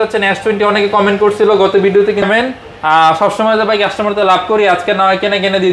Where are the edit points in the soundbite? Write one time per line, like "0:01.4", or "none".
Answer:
0:02.2